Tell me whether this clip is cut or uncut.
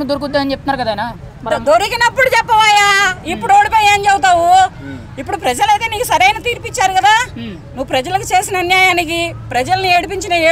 uncut